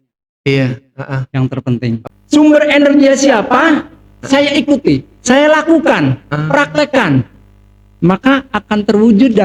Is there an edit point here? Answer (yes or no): yes